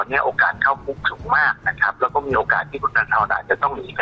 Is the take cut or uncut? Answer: uncut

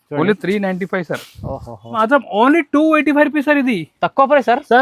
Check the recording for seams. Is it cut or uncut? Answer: cut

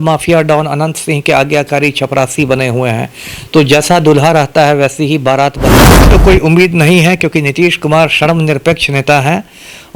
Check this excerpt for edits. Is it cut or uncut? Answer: cut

